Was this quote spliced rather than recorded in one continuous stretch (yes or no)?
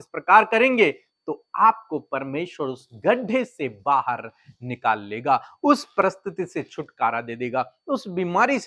no